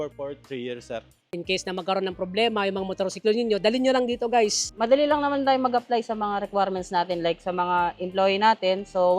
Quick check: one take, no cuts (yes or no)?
no